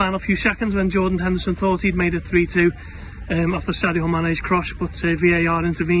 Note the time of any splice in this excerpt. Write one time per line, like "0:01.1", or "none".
none